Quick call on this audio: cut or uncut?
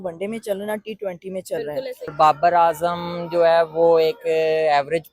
cut